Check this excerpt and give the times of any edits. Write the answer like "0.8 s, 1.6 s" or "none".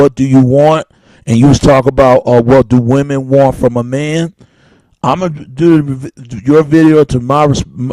4.6 s